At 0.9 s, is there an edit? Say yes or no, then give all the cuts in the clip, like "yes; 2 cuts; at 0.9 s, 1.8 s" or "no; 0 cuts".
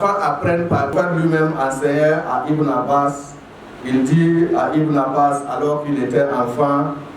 yes; 1 cut; at 0.9 s